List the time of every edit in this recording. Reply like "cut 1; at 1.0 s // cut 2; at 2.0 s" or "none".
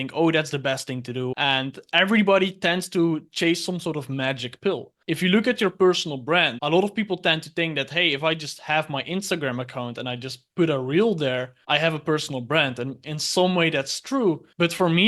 cut 1; at 1.3 s // cut 2; at 4.9 s